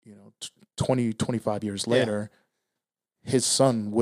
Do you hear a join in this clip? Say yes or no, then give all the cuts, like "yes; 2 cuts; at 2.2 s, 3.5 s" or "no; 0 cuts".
no; 0 cuts